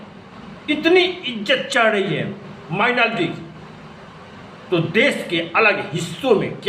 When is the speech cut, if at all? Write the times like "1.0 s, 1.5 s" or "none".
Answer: none